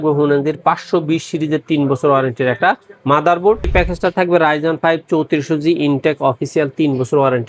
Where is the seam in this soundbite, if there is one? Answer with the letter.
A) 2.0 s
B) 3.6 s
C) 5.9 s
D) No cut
B